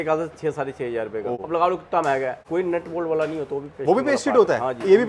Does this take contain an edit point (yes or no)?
yes